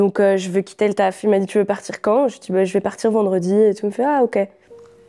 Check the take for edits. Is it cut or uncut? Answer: uncut